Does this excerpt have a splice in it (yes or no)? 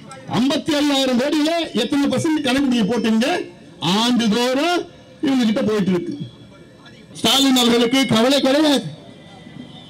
yes